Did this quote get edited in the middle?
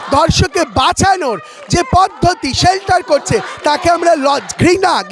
no; 0 cuts

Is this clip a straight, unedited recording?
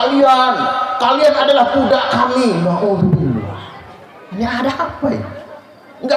yes; 0 cuts

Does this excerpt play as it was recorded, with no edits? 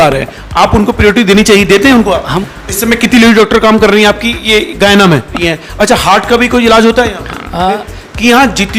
no; 3 cuts; at 2.3 s, 5.5 s, 7.9 s

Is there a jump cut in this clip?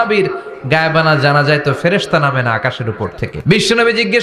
yes; 1 cut; at 3.3 s

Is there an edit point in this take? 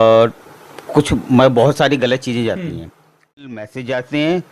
yes; 1 cut; at 3.3 s

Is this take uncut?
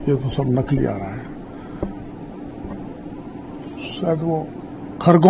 yes; 0 cuts

